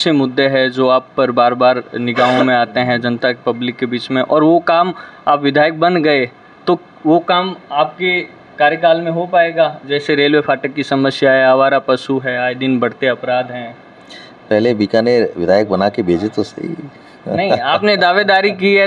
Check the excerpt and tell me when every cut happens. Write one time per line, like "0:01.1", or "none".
none